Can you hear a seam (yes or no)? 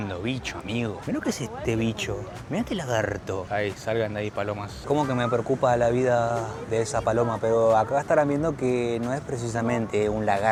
no